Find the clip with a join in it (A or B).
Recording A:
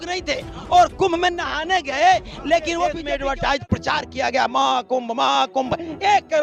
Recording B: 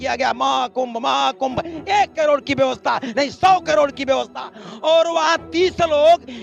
A